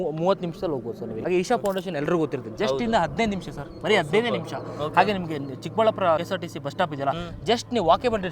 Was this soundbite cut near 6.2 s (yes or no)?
yes